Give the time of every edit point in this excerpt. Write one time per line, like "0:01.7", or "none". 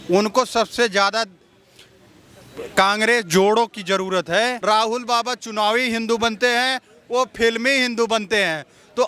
0:04.6